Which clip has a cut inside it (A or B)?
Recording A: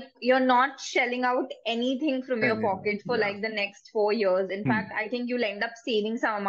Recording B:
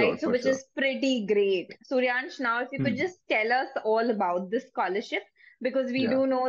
B